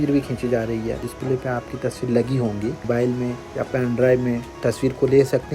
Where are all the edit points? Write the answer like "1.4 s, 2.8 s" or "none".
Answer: 1.1 s, 2.8 s